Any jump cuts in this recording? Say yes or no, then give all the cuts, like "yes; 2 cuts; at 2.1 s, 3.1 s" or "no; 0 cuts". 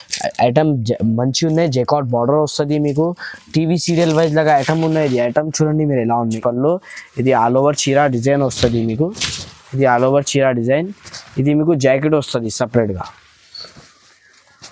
yes; 1 cut; at 6.4 s